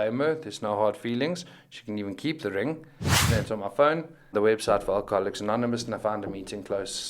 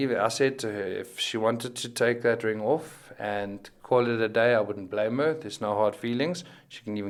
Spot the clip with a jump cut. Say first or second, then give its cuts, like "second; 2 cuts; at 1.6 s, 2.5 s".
first; 2 cuts; at 3.2 s, 4.3 s